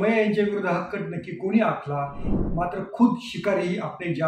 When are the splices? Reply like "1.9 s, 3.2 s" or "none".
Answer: 2.3 s